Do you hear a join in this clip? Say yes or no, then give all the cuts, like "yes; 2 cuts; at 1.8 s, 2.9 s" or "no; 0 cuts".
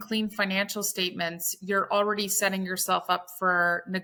no; 0 cuts